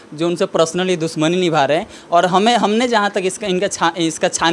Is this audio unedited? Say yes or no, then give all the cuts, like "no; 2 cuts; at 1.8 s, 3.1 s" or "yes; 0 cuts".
yes; 0 cuts